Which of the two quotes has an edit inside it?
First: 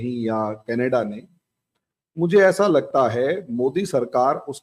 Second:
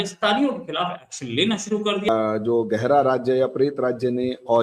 second; 1 cut; at 2.1 s

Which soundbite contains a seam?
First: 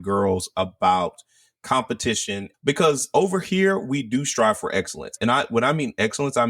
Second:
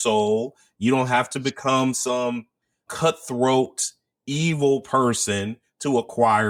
first; 2 cuts; at 2.5 s, 5.1 s

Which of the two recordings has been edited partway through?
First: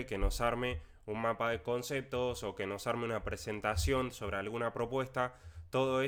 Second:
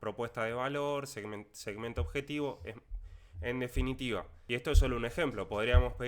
second; 1 cut; at 4.3 s

